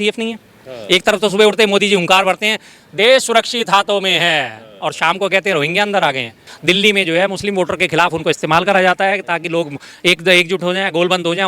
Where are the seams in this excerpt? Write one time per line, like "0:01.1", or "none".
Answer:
0:06.5

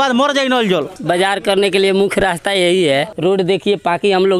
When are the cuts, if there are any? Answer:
0:00.9
0:03.1

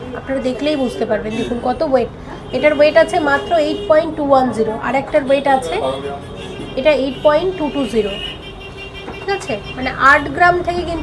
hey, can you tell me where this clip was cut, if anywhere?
none

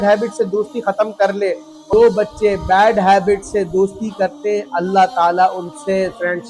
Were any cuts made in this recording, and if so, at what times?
0:01.8

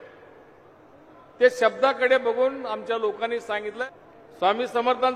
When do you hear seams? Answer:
0:03.8

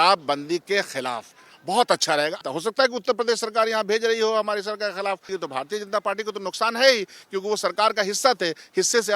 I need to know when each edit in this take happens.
0:02.4
0:05.3

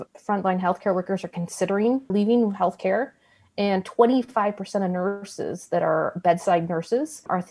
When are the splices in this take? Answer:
none

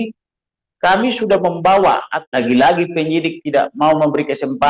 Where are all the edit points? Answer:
0:02.2

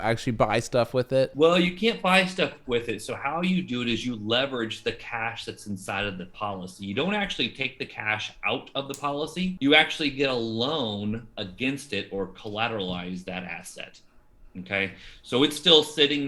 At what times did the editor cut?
0:01.3
0:09.6

